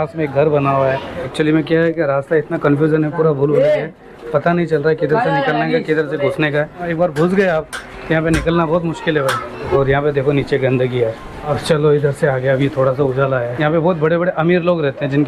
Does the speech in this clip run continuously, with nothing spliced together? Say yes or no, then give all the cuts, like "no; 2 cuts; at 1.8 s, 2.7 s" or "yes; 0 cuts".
no; 4 cuts; at 1.2 s, 6.9 s, 9.7 s, 13.5 s